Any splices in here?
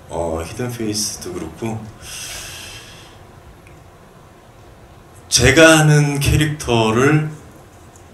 no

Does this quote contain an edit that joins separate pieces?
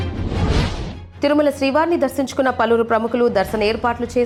no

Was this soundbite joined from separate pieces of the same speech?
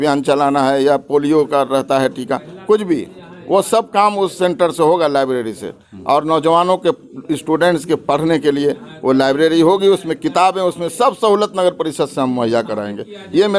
no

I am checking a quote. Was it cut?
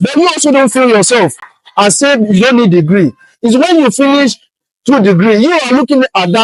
no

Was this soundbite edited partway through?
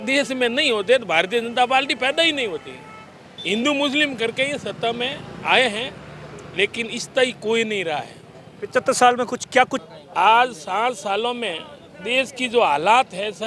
yes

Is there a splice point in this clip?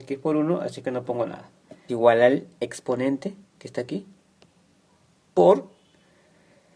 no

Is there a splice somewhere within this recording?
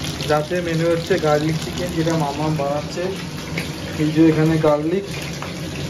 no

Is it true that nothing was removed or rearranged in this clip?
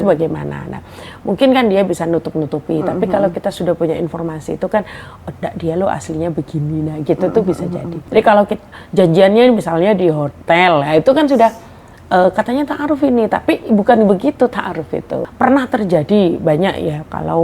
no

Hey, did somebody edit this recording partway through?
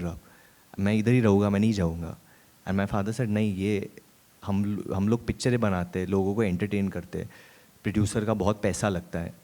no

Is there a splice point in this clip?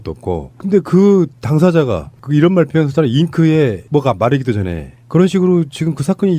yes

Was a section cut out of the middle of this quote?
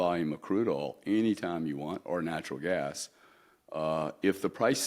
no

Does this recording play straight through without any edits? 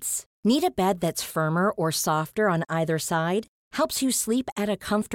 yes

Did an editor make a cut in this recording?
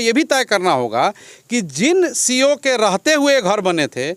no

